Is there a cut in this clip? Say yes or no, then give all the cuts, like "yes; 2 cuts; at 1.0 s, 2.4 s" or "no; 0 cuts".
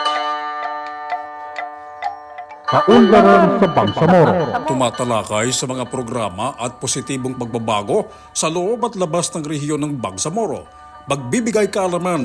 yes; 1 cut; at 2.7 s